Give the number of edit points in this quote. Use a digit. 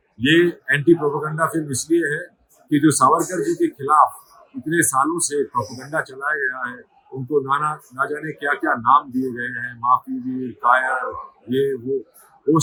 0